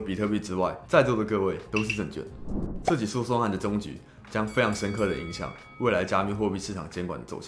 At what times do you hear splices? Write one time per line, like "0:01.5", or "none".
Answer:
0:02.6